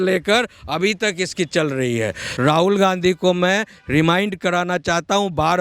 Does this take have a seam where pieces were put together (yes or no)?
yes